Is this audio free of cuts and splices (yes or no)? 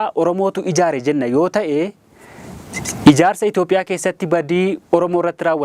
yes